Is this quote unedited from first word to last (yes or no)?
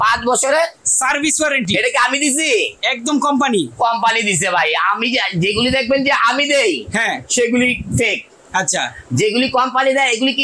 yes